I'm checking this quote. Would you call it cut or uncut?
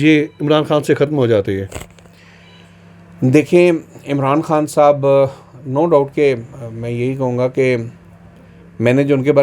uncut